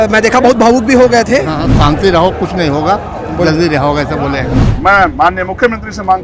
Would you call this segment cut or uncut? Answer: cut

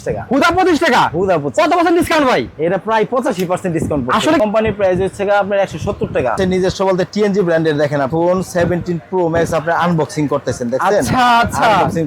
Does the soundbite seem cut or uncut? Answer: cut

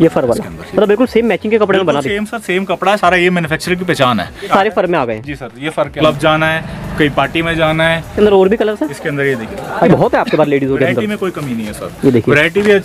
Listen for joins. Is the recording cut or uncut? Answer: cut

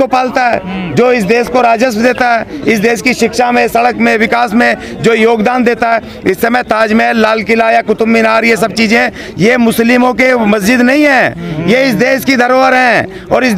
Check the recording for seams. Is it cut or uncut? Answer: uncut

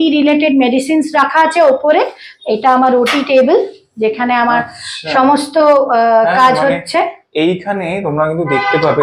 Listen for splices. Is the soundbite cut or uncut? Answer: uncut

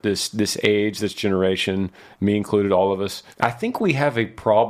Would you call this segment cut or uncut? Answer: cut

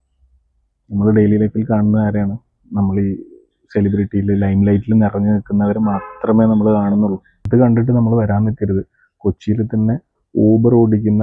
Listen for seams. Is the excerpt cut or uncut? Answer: cut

